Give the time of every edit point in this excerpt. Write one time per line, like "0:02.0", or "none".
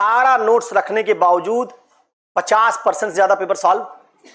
none

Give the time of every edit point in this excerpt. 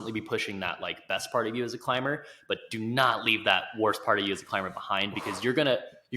none

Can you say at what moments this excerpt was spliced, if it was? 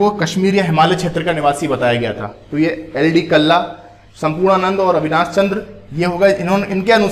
none

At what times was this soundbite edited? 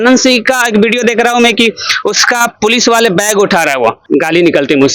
0:04.0

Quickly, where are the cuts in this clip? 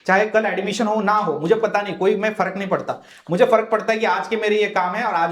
none

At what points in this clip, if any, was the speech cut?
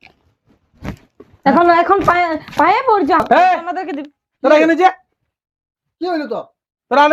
none

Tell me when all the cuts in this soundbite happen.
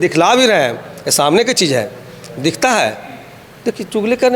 none

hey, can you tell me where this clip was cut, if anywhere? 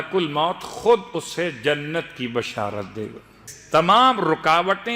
0:03.5

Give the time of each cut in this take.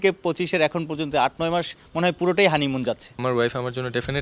0:03.1

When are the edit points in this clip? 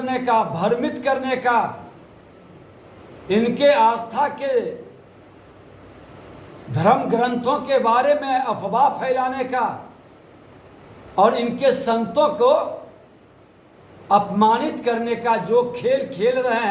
none

